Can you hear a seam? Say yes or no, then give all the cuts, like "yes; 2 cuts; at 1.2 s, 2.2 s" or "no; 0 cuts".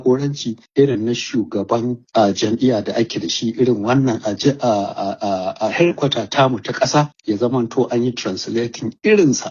no; 0 cuts